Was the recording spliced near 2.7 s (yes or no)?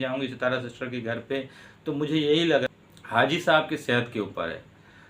yes